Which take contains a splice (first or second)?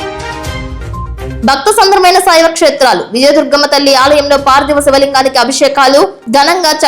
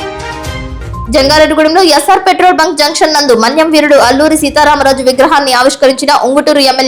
first